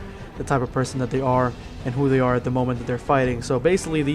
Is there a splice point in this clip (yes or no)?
yes